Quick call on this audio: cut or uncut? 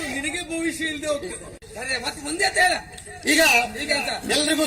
cut